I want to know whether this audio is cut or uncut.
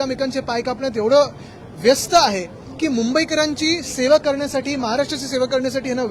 uncut